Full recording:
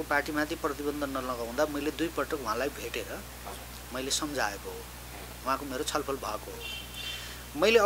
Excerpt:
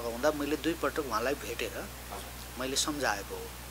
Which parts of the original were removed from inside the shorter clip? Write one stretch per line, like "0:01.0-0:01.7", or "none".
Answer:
none